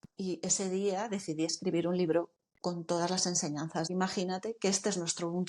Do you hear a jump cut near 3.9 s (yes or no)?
yes